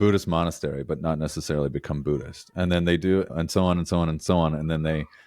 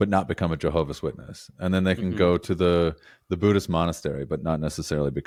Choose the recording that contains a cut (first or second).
first